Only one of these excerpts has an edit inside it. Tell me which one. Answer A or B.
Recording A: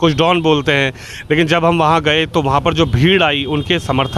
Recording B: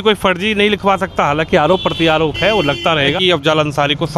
B